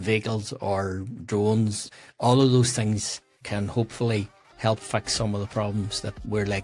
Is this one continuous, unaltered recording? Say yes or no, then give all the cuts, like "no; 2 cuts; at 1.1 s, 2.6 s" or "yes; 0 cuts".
no; 2 cuts; at 1.9 s, 3.4 s